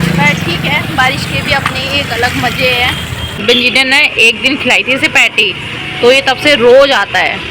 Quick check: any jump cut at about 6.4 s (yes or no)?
no